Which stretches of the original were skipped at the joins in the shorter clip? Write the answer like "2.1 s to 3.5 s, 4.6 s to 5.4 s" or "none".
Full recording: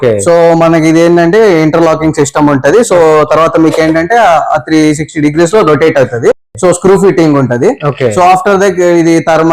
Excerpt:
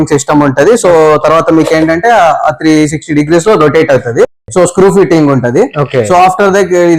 none